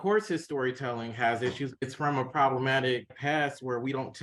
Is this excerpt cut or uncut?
uncut